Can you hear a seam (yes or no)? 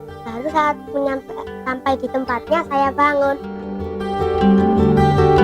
yes